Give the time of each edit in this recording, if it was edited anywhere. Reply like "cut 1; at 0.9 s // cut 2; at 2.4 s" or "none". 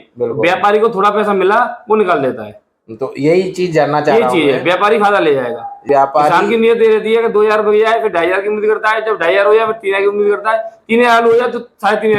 cut 1; at 5.8 s